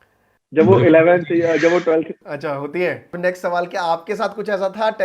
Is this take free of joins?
no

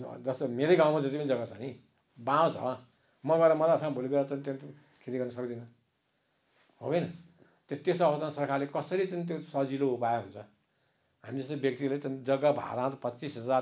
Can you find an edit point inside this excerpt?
no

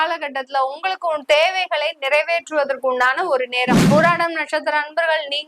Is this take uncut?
no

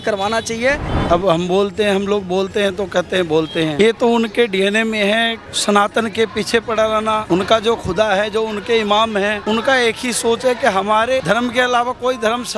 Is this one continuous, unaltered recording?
no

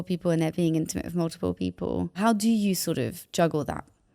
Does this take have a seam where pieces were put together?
yes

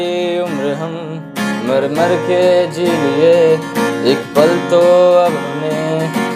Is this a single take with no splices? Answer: yes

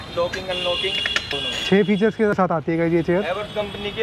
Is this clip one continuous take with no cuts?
no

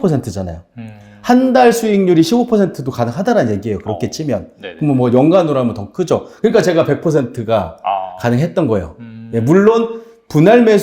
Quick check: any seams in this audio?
no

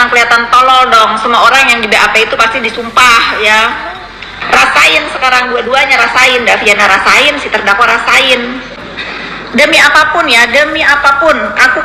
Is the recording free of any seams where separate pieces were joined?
no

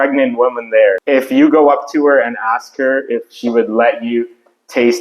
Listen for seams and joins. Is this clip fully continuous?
no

